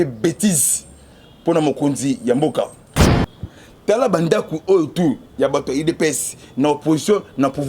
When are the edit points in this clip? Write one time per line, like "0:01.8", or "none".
0:03.1